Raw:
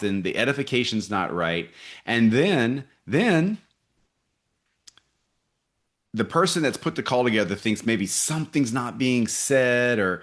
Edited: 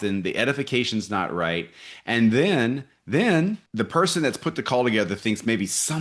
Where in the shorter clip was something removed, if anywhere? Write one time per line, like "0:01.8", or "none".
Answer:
0:03.6